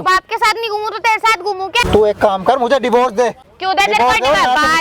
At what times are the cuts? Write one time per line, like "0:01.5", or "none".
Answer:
0:01.9
0:03.4